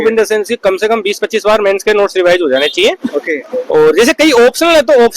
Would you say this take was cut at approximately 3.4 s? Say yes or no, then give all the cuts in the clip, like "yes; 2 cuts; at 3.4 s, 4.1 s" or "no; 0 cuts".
no; 0 cuts